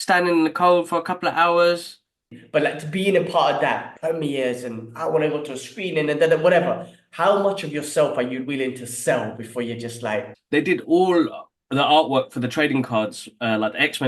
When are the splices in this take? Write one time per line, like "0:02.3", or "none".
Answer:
0:02.4
0:10.4